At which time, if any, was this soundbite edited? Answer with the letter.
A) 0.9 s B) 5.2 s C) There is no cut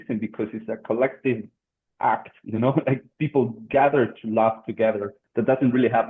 B